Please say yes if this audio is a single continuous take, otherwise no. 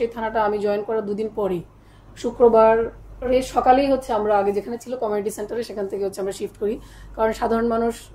yes